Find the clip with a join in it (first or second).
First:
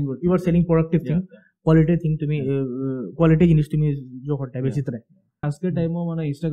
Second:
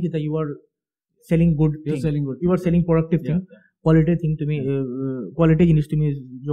first